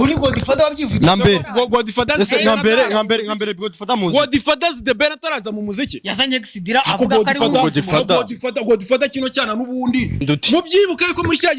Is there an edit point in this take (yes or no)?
yes